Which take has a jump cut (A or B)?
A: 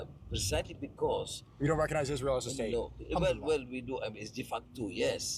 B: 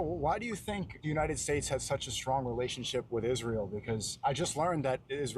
B